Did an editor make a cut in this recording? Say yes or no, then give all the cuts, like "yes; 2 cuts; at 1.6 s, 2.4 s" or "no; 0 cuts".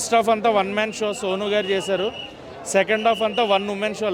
no; 0 cuts